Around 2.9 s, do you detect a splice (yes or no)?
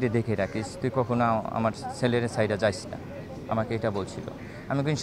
no